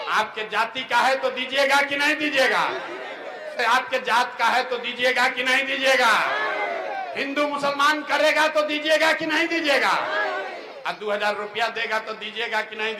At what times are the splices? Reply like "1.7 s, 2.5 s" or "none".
none